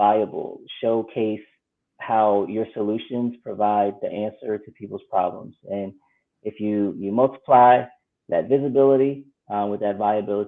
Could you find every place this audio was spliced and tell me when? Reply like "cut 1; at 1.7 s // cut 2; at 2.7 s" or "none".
none